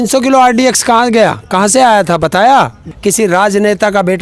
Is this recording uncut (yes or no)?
no